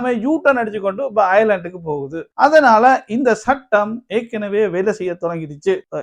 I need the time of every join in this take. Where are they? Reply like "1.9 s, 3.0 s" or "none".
none